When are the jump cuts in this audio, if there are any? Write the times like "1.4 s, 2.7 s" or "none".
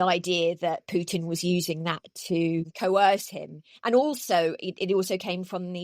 2.7 s